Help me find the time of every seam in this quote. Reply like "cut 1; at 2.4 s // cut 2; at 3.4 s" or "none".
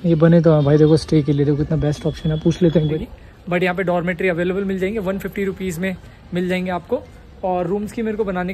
cut 1; at 2.9 s